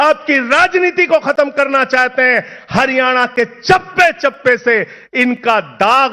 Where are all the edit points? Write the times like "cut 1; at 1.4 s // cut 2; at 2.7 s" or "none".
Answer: none